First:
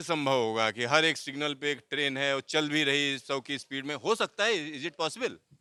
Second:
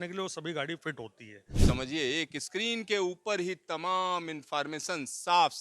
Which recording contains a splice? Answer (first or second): second